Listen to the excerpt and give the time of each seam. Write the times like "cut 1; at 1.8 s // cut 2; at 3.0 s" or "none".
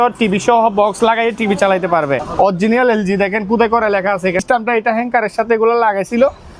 cut 1; at 2.3 s // cut 2; at 4.4 s